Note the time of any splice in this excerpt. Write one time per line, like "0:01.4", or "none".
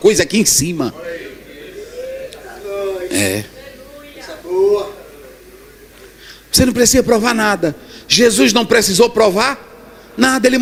none